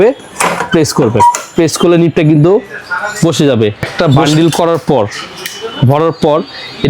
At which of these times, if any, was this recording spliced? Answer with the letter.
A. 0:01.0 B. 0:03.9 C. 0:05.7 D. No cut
B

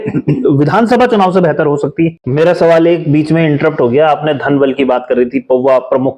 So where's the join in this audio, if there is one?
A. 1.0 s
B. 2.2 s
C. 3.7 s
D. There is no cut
B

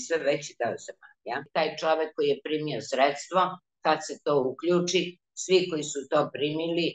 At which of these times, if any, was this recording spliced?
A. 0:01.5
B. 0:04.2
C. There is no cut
A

